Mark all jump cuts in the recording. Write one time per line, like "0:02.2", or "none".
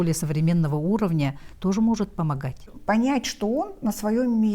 0:02.7